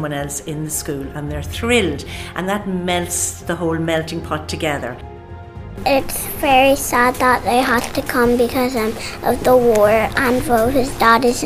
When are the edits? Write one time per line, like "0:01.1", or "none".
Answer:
0:05.4